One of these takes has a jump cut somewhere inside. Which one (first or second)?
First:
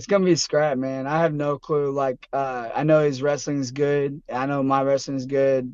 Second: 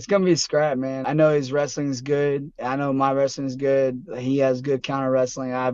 second